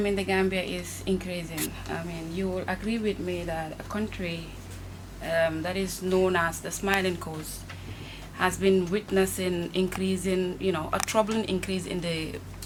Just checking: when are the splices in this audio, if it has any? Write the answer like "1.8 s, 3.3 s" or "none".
none